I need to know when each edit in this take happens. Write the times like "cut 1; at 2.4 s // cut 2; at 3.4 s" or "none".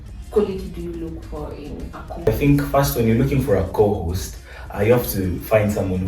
cut 1; at 2.3 s